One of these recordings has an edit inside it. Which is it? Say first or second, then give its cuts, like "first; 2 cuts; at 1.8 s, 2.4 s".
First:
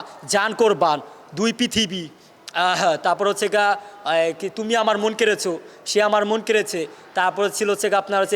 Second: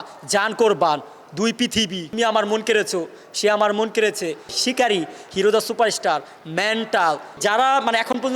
second; 3 cuts; at 2.1 s, 4.5 s, 7.4 s